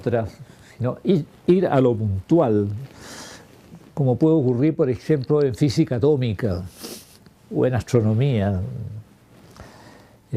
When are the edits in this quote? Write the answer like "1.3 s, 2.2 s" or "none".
2.5 s